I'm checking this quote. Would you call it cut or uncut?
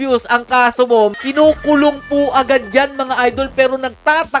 uncut